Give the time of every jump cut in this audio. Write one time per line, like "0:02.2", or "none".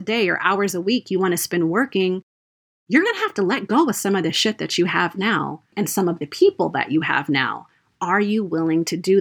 0:05.7